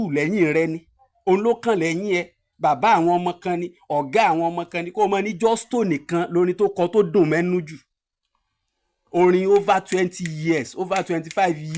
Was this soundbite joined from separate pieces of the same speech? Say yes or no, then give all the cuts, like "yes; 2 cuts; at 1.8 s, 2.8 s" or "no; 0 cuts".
no; 0 cuts